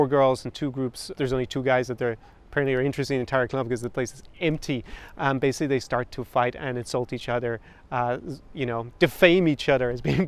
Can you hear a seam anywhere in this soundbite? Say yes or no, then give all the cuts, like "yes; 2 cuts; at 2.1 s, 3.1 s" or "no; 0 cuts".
yes; 1 cut; at 1.1 s